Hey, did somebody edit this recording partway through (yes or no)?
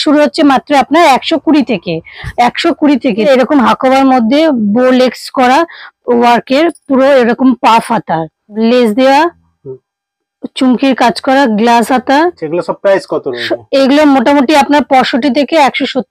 yes